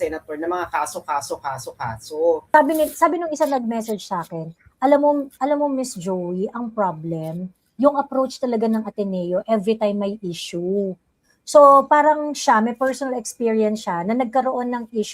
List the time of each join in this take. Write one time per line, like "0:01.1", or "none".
0:02.4